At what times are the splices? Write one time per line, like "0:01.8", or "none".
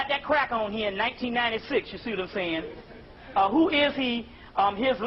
0:03.6